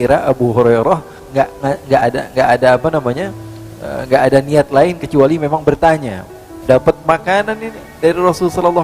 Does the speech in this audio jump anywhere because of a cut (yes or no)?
yes